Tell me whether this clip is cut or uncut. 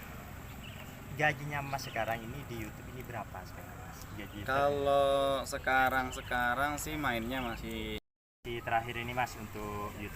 cut